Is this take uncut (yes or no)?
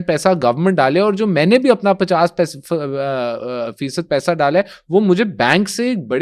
yes